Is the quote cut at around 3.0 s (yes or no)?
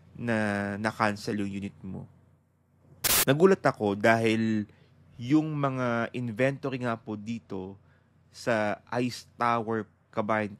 yes